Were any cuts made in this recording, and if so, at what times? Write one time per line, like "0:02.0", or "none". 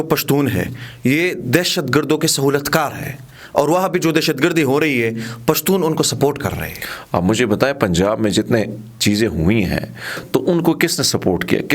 none